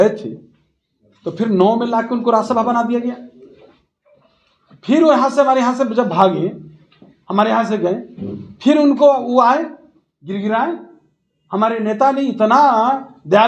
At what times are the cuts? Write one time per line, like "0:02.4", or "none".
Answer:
none